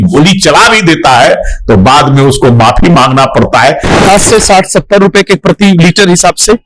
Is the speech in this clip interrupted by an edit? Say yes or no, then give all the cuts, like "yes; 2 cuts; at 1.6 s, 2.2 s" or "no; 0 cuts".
yes; 1 cut; at 4.0 s